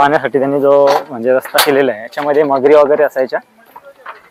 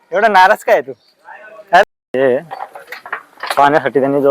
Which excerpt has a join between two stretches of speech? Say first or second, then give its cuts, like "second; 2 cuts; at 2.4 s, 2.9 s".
second; 1 cut; at 2.1 s